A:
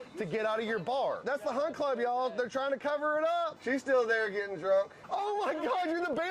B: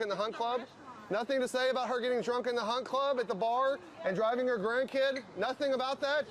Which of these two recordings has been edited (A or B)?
A